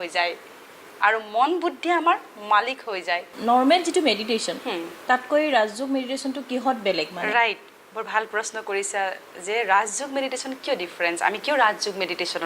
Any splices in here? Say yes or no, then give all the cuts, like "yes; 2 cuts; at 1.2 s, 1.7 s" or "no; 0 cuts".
yes; 1 cut; at 3.3 s